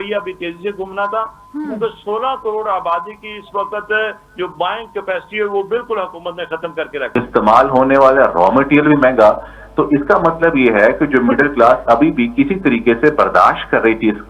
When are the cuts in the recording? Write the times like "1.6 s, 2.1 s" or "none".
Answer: 7.0 s

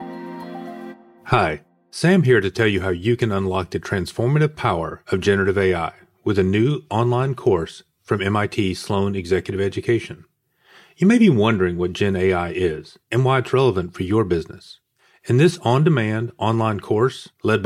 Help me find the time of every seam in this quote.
1.1 s

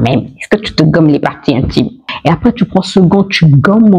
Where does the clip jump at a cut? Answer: 2.1 s

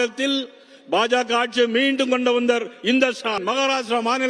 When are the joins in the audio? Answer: 3.4 s

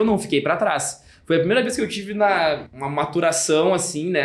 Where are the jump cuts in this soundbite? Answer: 2.7 s

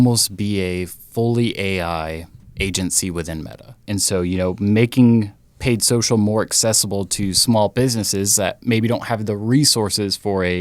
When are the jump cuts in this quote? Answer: 3.8 s

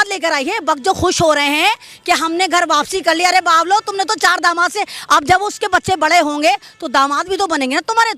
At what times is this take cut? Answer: none

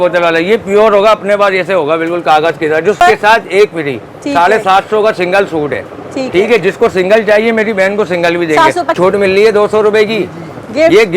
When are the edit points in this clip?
3.0 s, 9.0 s

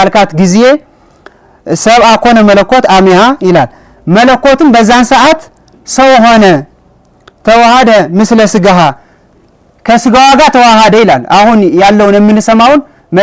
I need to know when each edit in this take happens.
none

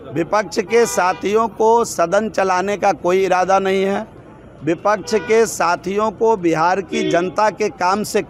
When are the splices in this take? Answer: none

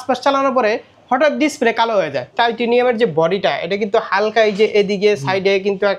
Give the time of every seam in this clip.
2.2 s

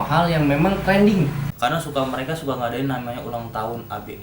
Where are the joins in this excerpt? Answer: 1.5 s

